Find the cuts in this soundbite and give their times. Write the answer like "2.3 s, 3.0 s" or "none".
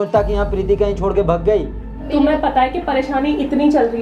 2.1 s

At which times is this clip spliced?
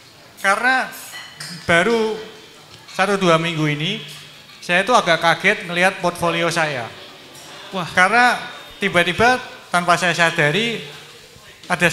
none

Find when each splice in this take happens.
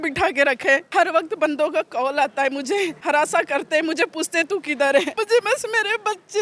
0.8 s, 3.0 s, 5.2 s

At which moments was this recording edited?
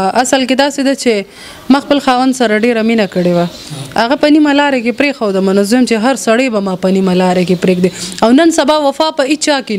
none

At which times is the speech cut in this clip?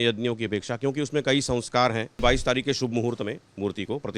2.2 s

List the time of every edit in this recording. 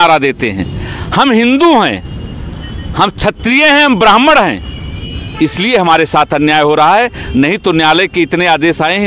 none

